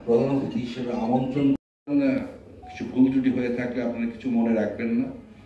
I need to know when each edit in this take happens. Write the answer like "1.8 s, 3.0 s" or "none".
1.7 s